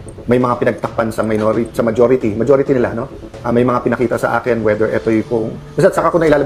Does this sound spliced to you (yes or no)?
no